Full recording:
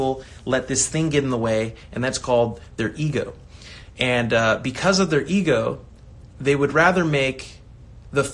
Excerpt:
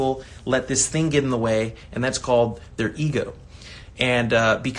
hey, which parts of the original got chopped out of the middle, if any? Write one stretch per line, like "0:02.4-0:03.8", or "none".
none